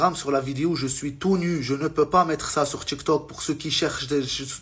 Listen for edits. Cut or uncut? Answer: uncut